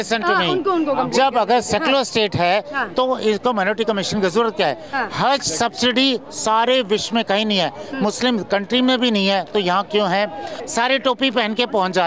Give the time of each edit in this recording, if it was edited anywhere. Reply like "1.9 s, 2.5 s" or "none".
10.6 s